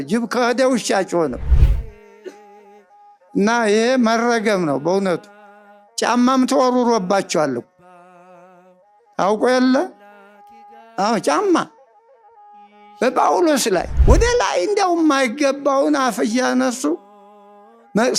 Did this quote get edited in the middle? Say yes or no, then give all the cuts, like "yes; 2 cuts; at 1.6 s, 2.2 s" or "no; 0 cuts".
yes; 1 cut; at 13.9 s